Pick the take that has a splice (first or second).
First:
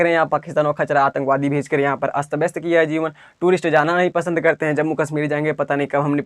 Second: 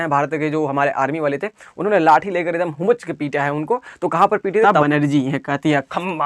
second